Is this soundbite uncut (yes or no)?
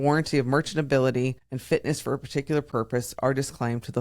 no